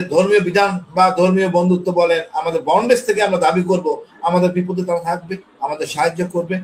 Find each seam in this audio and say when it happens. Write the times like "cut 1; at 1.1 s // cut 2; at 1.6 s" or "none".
none

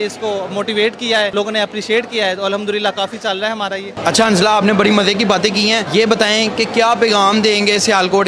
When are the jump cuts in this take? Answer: none

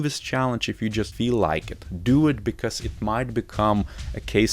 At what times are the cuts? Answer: cut 1; at 1.1 s

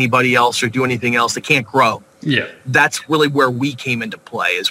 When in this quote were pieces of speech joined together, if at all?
none

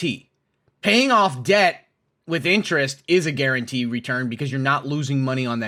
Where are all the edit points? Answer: none

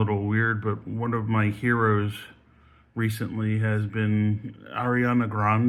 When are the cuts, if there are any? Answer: none

